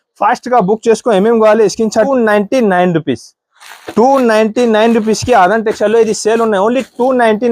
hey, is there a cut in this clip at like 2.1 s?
yes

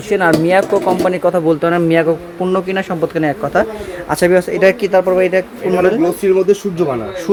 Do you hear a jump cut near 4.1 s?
no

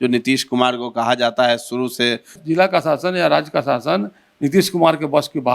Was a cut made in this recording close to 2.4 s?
yes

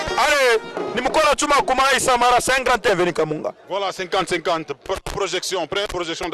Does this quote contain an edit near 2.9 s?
yes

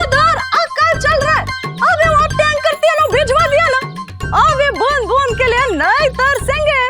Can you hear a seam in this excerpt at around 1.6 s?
yes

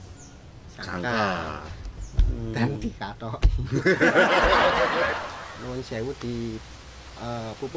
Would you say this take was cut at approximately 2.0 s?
no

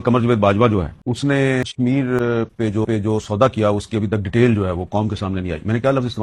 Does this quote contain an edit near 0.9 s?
yes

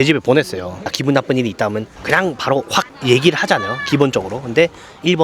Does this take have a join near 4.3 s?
no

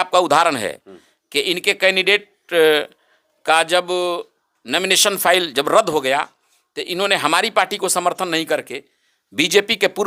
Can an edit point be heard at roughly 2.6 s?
no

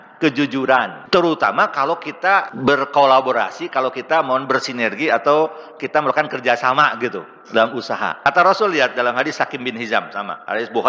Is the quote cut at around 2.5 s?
yes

